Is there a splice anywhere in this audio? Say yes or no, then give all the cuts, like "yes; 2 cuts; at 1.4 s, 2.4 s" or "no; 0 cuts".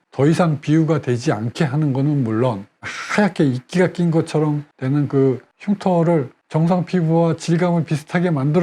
yes; 1 cut; at 2.8 s